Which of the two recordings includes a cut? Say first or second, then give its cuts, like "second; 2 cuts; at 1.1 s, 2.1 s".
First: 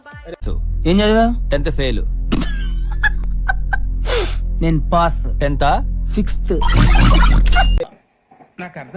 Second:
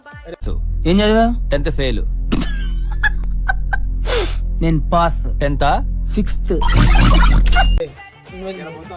first; 1 cut; at 7.9 s